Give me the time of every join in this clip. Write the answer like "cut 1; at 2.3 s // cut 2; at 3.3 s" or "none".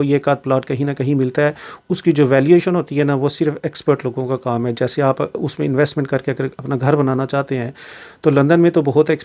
none